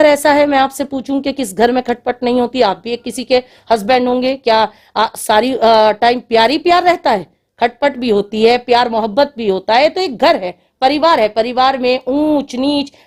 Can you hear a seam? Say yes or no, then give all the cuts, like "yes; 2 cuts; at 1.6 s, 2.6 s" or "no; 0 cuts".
no; 0 cuts